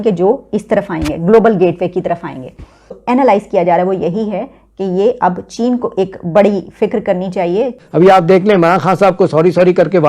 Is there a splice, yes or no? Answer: yes